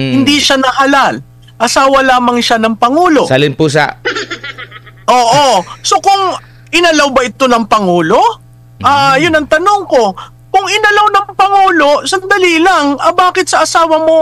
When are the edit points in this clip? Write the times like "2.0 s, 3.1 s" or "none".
none

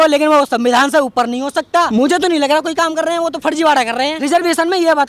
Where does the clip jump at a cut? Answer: 1.9 s, 4.2 s

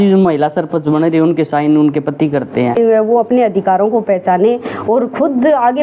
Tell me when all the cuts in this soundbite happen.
2.8 s

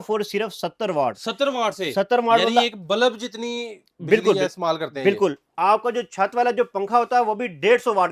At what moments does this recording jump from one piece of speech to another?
none

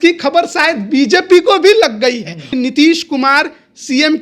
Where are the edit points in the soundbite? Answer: 2.5 s

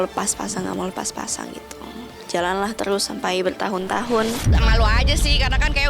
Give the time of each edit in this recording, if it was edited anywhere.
4.4 s

